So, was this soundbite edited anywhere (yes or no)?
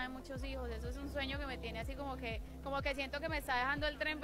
no